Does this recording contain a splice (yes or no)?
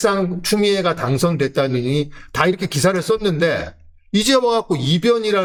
no